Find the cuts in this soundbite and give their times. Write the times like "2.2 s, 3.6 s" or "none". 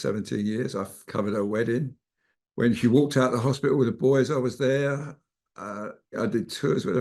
1.0 s, 6.2 s